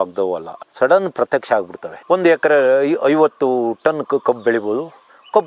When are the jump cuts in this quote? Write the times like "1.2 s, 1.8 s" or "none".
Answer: 2.0 s